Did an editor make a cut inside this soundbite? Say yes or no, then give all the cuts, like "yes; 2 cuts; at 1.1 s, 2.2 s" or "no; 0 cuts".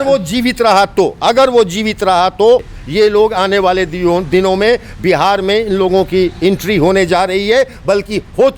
yes; 1 cut; at 2.8 s